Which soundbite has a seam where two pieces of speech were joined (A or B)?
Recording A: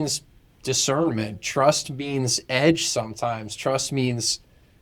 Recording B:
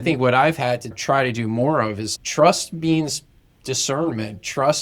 B